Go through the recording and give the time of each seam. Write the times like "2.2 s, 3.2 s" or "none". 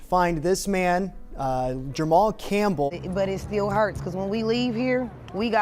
3.0 s